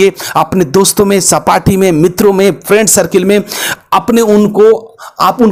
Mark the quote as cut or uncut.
uncut